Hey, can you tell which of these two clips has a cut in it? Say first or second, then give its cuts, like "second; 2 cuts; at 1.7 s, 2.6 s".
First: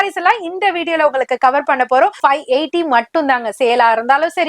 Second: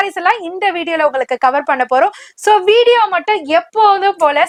first; 1 cut; at 2.2 s